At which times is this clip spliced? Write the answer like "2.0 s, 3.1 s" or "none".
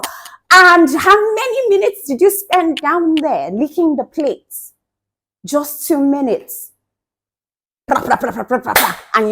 none